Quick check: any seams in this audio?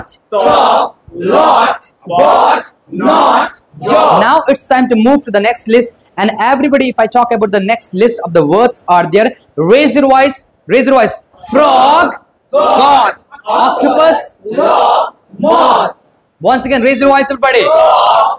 yes; 1 cut; at 4.2 s

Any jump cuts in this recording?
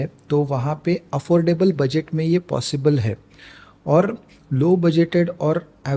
no; 0 cuts

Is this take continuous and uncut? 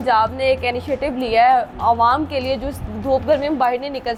yes; 0 cuts

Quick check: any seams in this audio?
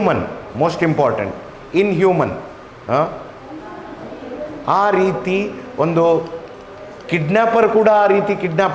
no; 0 cuts

